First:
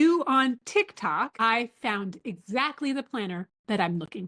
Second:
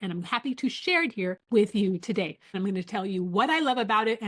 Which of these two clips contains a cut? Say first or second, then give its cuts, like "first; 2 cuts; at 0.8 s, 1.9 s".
second; 2 cuts; at 1.4 s, 2.5 s